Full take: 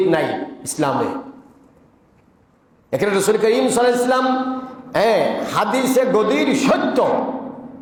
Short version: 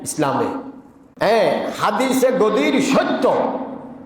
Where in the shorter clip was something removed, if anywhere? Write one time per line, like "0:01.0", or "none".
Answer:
0:01.0